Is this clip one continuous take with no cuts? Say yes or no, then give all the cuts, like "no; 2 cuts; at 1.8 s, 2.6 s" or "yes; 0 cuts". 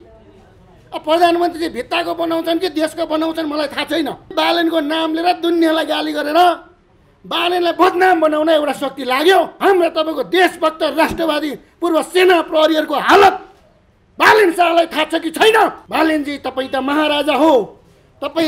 no; 3 cuts; at 4.3 s, 9.5 s, 15.8 s